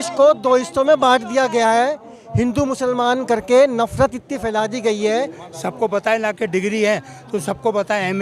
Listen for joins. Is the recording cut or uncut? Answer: cut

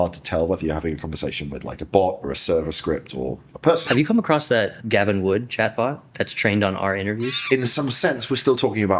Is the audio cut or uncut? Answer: cut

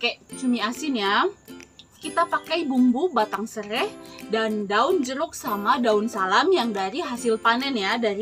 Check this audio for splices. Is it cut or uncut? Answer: cut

